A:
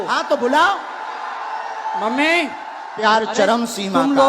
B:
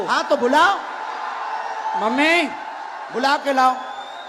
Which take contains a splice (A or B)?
A